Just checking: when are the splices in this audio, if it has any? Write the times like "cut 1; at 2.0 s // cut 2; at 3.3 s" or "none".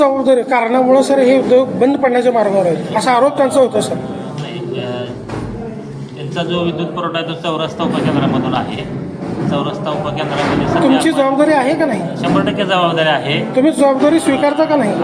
none